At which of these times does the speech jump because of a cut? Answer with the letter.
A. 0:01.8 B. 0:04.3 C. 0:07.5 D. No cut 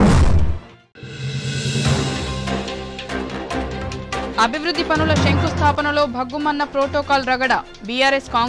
B